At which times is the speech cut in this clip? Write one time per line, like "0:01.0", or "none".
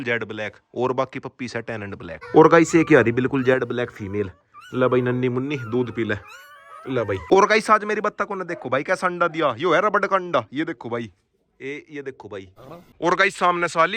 0:02.2
0:07.2
0:12.9